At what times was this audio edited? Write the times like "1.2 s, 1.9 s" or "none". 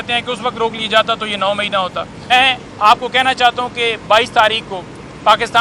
2.3 s